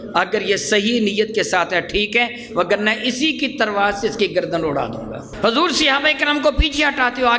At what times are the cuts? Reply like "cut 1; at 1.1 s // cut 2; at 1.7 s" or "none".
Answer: cut 1; at 5.2 s